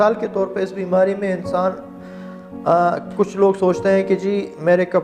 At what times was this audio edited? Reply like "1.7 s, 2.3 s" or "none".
none

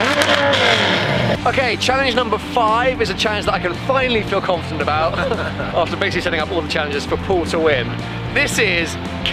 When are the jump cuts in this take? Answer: 1.4 s

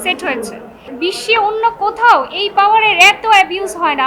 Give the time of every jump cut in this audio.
0.9 s

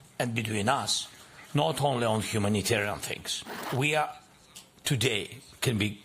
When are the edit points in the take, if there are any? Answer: 3.6 s

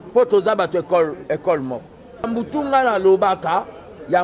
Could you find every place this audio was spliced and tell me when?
2.3 s

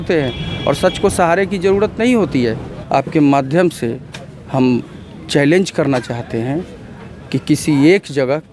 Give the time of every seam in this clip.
2.7 s

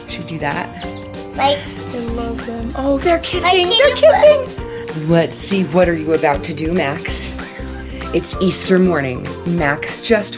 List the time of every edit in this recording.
1.0 s, 4.9 s

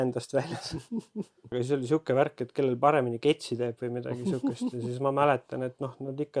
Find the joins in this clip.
1.5 s

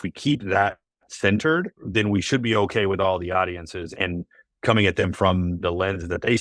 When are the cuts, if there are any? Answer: 1.8 s, 3.9 s, 5.6 s

